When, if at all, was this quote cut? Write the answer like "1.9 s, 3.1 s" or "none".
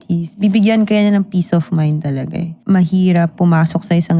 2.5 s